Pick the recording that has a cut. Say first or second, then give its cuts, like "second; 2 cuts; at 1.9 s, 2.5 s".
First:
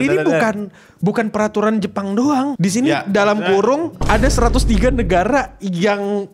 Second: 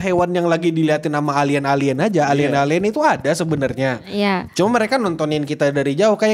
first; 2 cuts; at 2.5 s, 4.0 s